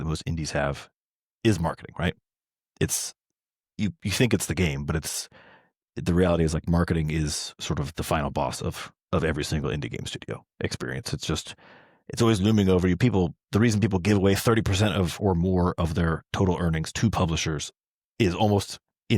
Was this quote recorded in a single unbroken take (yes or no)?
yes